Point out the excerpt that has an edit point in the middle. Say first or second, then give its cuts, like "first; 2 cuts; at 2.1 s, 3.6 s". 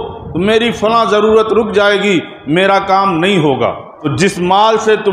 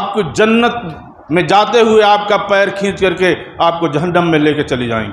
first; 1 cut; at 4.1 s